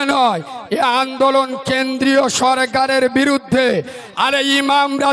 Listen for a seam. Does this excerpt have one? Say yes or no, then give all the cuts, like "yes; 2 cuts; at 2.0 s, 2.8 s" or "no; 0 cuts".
yes; 1 cut; at 4.0 s